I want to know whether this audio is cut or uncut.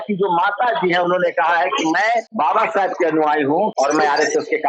cut